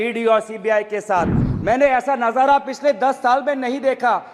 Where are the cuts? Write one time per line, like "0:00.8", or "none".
0:01.4